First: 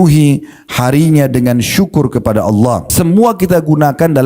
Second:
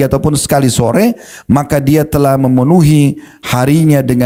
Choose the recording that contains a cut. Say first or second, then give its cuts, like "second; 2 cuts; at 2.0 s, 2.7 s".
first; 1 cut; at 2.9 s